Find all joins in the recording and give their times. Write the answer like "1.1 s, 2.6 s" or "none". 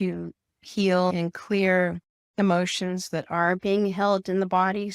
1.1 s